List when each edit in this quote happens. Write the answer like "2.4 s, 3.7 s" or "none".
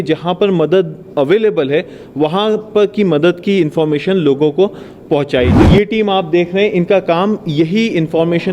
5.5 s